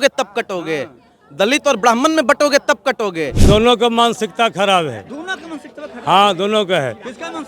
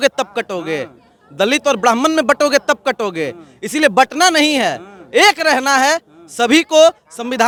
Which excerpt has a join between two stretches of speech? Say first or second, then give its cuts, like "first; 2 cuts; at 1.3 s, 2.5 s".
first; 1 cut; at 3.3 s